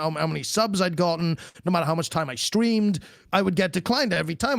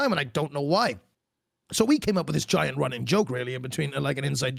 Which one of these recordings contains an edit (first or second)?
first